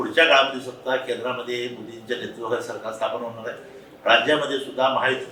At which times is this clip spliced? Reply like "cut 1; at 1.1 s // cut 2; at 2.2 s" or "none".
none